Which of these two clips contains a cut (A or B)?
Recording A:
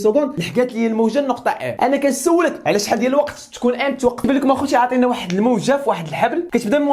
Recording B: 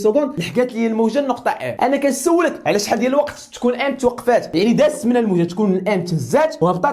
A